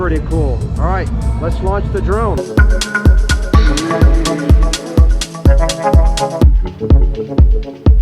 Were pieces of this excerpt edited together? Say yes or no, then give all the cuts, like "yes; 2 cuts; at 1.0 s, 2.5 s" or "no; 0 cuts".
yes; 2 cuts; at 2.4 s, 6.4 s